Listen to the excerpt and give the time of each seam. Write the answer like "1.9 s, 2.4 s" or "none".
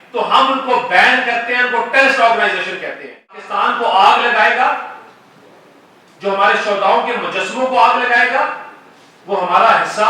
3.5 s

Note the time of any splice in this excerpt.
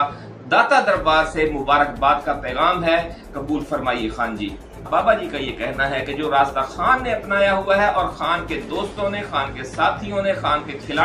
4.8 s

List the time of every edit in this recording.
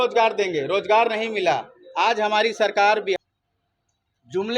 3.2 s

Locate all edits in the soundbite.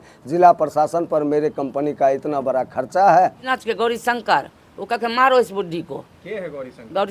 3.4 s

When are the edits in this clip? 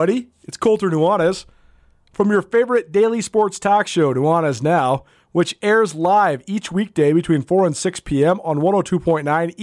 none

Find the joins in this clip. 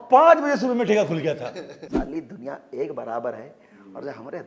1.8 s

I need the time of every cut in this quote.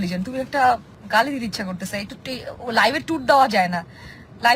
0.9 s

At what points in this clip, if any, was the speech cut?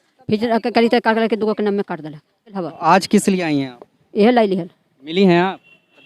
2.7 s

